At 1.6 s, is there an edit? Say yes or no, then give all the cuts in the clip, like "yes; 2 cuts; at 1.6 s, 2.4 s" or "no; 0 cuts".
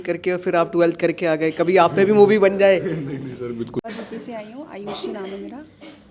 no; 1 cut; at 3.9 s